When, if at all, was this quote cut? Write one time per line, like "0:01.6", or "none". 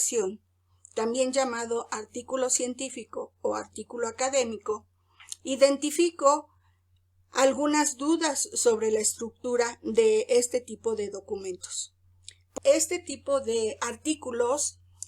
0:12.5